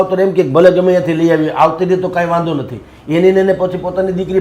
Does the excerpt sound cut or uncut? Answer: uncut